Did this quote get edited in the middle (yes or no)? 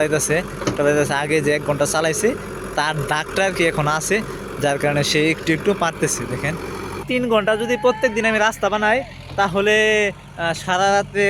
yes